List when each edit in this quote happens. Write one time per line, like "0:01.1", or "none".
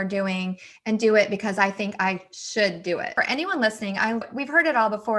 0:03.1
0:04.2